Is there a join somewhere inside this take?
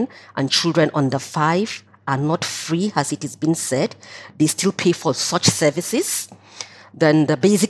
no; 0 cuts

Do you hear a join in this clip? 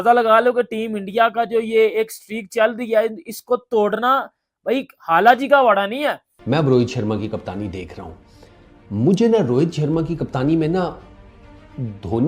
yes; 1 cut; at 6.3 s

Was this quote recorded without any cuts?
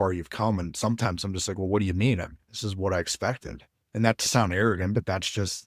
yes; 0 cuts

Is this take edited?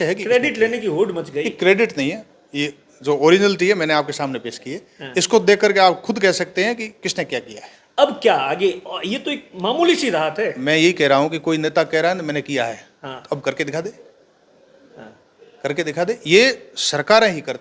no; 0 cuts

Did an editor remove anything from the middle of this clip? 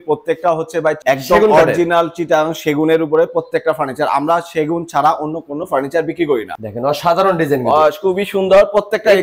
yes; 2 cuts; at 1.0 s, 6.6 s

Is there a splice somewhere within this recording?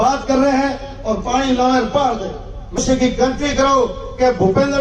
yes; 1 cut; at 2.8 s

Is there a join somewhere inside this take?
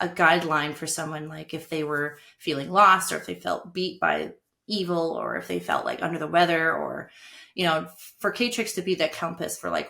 no; 0 cuts

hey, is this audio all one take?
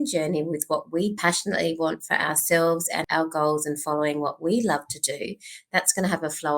no; 2 cuts; at 1.2 s, 3.0 s

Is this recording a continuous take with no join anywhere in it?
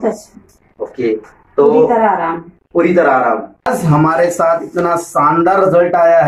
no; 1 cut; at 3.7 s

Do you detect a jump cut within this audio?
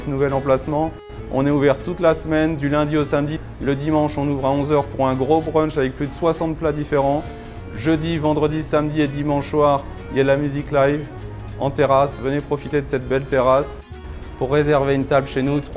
no; 0 cuts

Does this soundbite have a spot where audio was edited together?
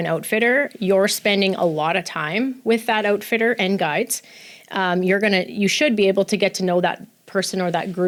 no; 0 cuts

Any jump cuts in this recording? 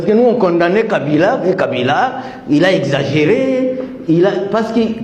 no; 0 cuts

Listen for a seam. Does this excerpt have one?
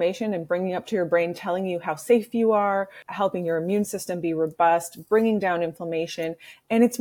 yes; 1 cut; at 3.0 s

